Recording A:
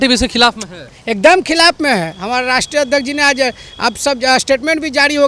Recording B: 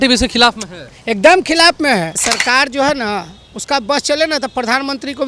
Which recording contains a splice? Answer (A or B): B